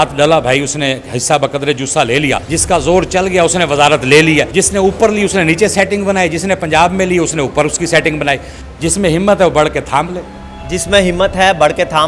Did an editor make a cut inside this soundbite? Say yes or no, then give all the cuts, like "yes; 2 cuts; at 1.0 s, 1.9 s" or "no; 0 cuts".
yes; 3 cuts; at 2.5 s, 4.5 s, 8.5 s